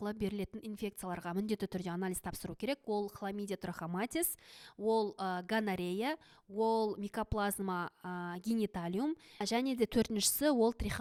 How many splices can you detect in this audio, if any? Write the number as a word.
zero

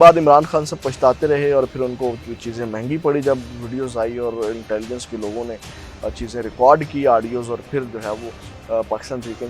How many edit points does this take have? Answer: zero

